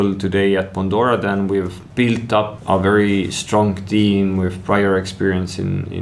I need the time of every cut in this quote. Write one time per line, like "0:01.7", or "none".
0:01.8
0:02.6